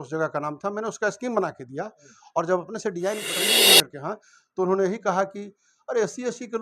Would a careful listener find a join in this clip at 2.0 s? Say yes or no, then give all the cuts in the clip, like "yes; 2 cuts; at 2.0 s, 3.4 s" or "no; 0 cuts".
no; 1 cut; at 3.6 s